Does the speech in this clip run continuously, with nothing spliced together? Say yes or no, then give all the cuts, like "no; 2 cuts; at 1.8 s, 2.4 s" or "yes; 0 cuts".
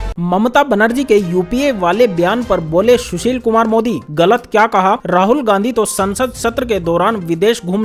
yes; 0 cuts